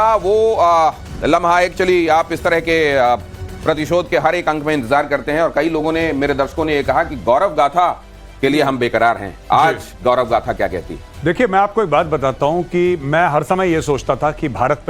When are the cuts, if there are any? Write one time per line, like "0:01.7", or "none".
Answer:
none